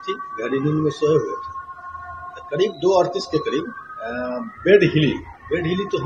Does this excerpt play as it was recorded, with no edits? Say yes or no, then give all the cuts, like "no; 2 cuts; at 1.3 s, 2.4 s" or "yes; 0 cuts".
yes; 0 cuts